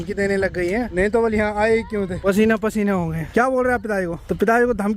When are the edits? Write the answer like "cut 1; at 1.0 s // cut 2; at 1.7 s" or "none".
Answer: cut 1; at 0.9 s // cut 2; at 2.2 s // cut 3; at 3.3 s // cut 4; at 4.2 s